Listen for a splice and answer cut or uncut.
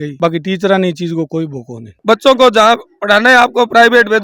cut